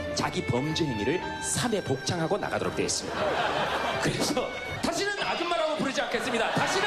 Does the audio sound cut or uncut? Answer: cut